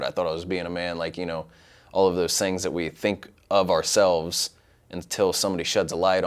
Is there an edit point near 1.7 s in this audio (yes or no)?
no